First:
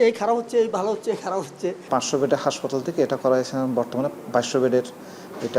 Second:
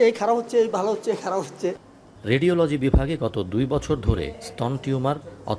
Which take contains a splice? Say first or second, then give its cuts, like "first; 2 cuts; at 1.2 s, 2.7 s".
first; 1 cut; at 1.9 s